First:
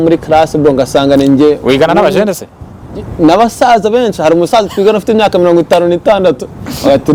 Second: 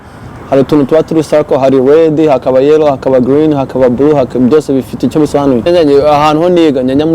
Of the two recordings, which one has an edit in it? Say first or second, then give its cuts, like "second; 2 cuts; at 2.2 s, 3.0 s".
second; 1 cut; at 5.7 s